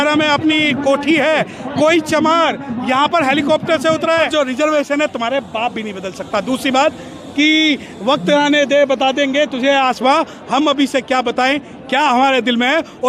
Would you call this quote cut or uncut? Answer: cut